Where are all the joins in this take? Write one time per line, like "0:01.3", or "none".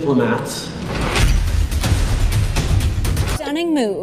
none